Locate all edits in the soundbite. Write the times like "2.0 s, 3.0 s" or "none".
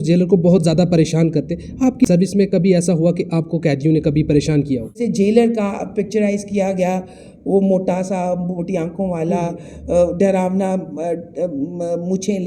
2.0 s, 5.0 s